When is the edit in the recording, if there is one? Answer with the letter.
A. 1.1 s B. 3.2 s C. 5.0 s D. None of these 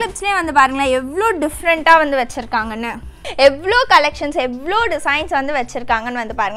D